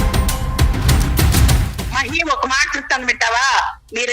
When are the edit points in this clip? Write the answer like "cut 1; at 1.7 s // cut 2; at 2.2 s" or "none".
cut 1; at 1.4 s